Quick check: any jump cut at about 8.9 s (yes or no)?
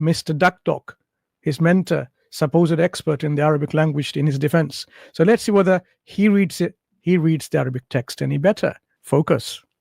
yes